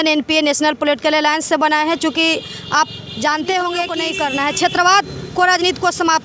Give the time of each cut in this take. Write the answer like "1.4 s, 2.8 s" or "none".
4.0 s